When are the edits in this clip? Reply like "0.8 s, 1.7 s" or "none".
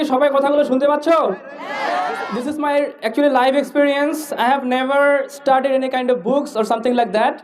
2.3 s